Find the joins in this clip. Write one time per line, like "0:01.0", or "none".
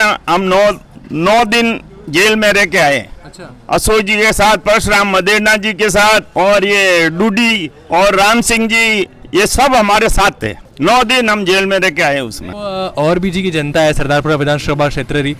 none